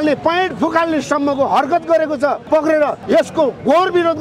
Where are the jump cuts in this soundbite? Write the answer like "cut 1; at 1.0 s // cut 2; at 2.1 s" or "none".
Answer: cut 1; at 2.4 s // cut 2; at 3.0 s